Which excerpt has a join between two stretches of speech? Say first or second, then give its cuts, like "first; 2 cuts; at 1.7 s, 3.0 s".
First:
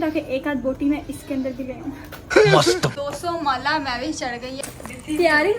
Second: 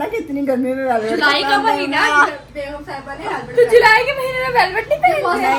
first; 2 cuts; at 2.9 s, 4.5 s